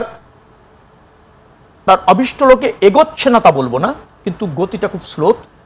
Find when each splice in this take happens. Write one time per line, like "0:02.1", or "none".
none